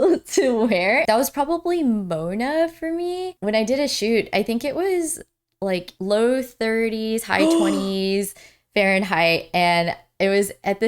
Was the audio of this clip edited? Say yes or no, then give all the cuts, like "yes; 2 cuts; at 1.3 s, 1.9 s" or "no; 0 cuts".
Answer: yes; 1 cut; at 1.0 s